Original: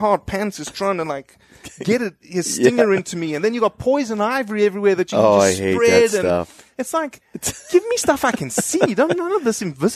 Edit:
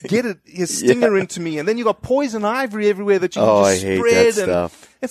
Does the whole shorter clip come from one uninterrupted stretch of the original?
yes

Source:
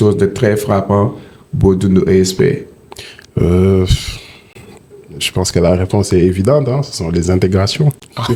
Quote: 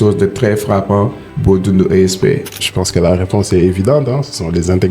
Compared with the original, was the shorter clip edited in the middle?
yes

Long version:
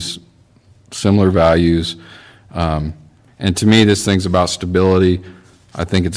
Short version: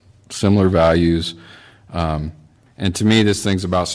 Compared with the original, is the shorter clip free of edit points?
yes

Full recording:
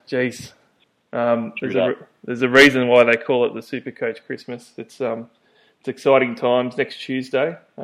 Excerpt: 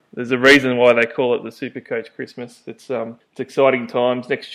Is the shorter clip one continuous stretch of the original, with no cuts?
no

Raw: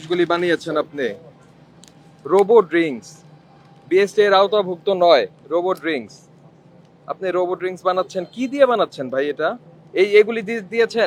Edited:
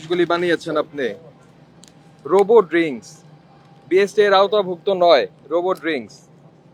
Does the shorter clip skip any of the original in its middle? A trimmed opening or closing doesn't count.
no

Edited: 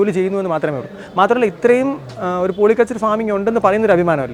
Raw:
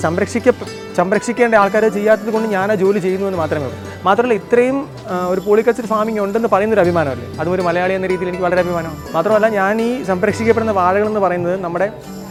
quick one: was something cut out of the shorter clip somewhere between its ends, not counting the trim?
no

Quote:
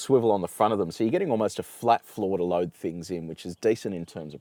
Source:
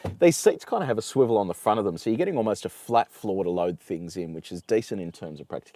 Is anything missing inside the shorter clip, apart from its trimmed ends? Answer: no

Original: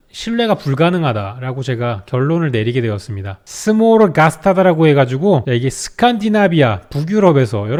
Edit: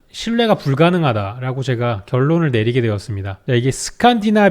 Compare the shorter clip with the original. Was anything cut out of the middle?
yes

